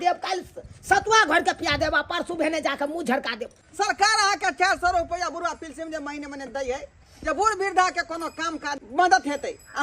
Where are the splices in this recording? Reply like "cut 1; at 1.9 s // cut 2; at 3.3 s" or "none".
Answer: cut 1; at 3.6 s // cut 2; at 8.8 s